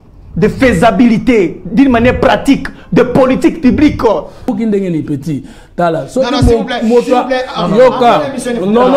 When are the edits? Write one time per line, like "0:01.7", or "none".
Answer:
0:04.5

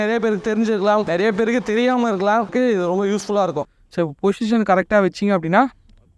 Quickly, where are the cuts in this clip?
0:01.1
0:02.5
0:03.7

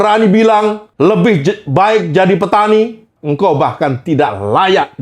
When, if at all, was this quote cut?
0:00.8
0:03.1

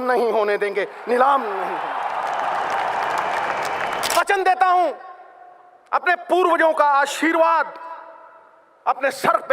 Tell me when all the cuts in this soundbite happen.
0:04.2

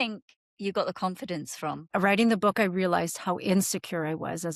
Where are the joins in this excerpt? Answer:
0:01.9

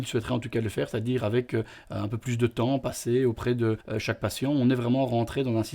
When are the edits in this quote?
0:03.9

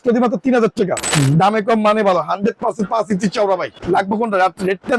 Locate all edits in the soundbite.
0:01.1
0:03.8

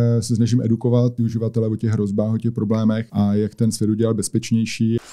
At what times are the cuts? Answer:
0:01.1
0:03.1

